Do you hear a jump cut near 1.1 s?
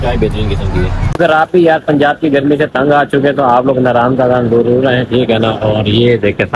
yes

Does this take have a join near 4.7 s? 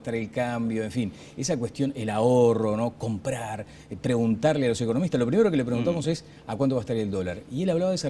yes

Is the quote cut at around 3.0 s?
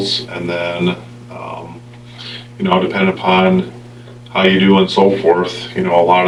no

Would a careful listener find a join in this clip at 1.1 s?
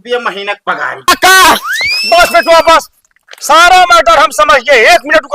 yes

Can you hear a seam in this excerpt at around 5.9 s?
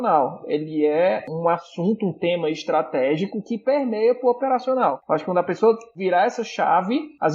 yes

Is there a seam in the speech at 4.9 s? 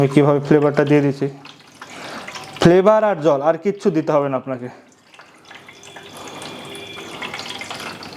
no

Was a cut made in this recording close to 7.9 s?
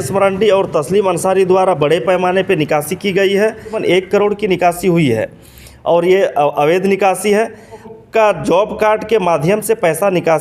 yes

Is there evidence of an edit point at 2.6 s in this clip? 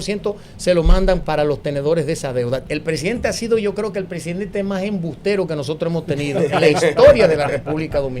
yes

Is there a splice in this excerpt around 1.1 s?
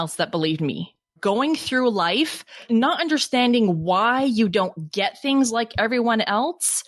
yes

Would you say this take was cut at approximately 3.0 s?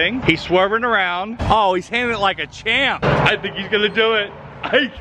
yes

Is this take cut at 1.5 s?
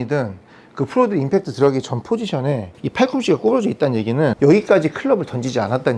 no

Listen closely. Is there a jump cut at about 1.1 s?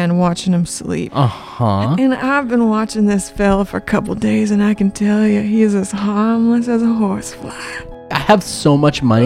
yes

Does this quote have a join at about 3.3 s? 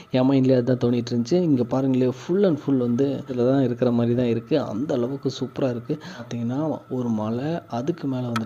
yes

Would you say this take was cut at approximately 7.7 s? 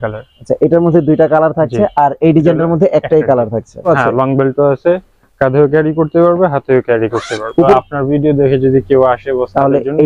yes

